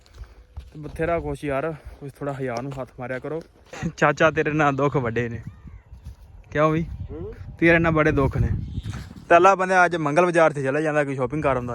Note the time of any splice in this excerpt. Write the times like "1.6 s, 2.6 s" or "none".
3.6 s